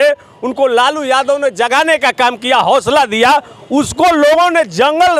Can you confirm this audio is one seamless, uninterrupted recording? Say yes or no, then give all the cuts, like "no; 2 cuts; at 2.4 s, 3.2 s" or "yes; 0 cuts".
yes; 0 cuts